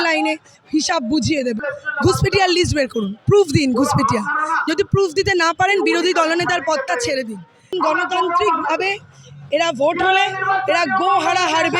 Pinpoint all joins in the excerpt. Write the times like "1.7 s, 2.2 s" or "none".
1.7 s, 7.7 s